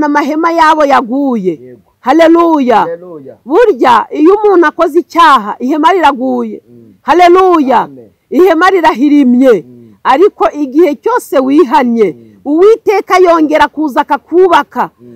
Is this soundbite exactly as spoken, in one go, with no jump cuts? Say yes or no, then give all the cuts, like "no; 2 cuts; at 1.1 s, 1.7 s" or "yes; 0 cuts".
yes; 0 cuts